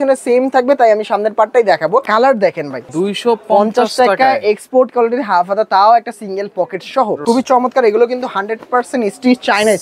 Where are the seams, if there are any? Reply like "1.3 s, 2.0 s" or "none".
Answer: 2.1 s, 2.8 s, 7.2 s